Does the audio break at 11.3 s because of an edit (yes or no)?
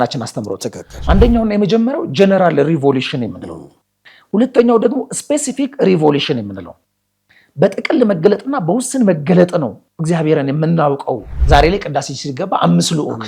yes